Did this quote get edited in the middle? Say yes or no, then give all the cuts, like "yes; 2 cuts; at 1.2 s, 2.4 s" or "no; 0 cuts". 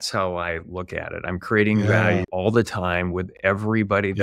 yes; 1 cut; at 2.3 s